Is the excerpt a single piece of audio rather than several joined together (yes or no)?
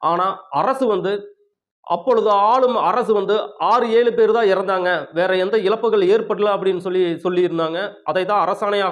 yes